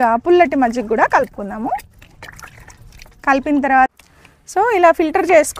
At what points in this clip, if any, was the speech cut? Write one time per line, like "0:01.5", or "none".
0:03.9